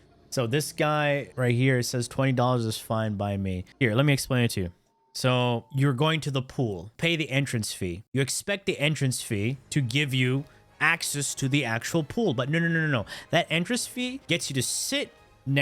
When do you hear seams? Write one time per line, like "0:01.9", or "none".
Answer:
0:01.3
0:03.6